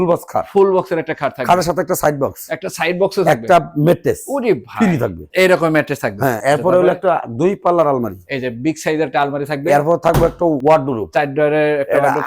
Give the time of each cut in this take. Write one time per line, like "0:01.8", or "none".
none